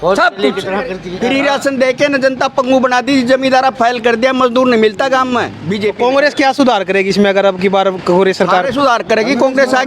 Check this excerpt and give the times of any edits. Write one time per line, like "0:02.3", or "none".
0:01.0
0:05.6